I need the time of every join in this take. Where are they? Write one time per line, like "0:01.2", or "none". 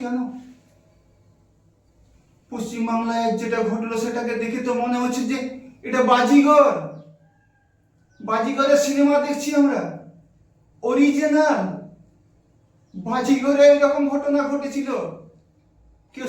none